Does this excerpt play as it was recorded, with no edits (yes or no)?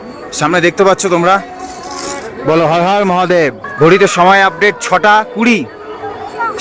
no